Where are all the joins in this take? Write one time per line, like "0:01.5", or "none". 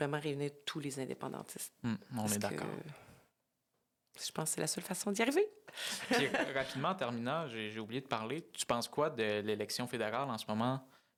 none